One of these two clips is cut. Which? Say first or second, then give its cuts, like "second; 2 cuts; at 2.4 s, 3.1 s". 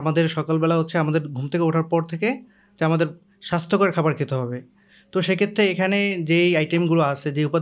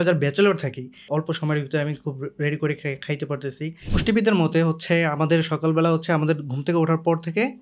second; 2 cuts; at 1.1 s, 3.8 s